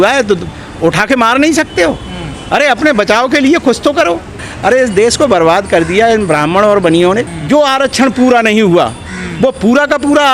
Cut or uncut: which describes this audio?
cut